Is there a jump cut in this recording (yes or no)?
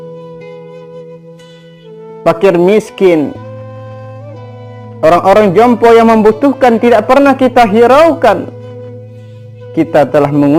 no